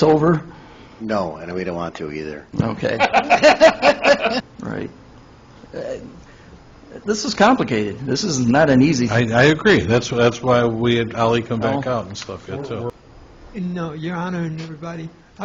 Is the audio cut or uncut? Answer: cut